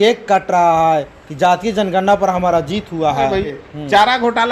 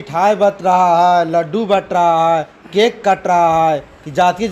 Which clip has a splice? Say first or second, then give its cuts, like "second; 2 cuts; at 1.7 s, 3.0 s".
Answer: first; 1 cut; at 3.5 s